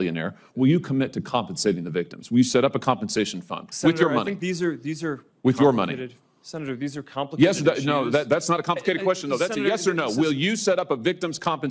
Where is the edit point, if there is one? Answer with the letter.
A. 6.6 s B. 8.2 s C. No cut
C